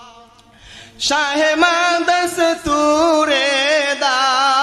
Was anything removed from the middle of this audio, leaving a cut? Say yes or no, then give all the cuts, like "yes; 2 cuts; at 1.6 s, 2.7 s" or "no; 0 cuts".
no; 0 cuts